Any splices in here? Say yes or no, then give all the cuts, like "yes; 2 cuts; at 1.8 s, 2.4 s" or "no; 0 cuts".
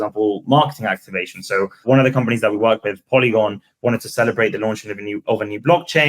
yes; 1 cut; at 1.8 s